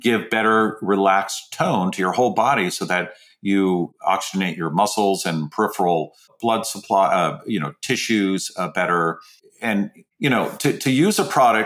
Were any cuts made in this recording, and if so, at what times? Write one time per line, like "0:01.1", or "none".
0:03.9
0:06.3
0:10.0